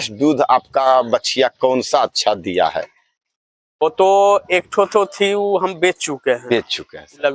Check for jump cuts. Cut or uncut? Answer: uncut